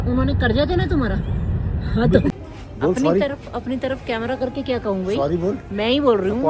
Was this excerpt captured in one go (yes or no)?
no